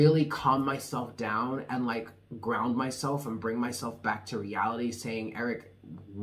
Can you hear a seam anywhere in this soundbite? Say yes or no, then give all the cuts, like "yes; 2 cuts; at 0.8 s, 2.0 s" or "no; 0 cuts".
no; 0 cuts